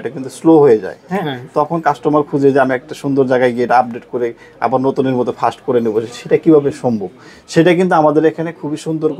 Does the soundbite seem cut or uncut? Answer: uncut